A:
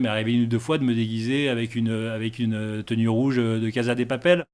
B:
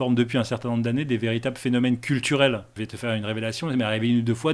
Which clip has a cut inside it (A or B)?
B